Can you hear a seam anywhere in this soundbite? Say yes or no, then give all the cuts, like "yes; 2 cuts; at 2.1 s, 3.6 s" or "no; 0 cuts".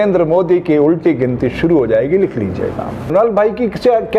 yes; 1 cut; at 3.1 s